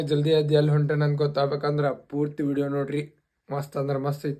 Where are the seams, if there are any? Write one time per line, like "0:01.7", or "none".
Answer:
none